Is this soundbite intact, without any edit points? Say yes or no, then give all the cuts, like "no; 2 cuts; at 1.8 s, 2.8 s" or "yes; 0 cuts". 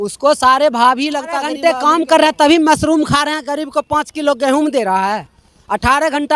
no; 1 cut; at 1.5 s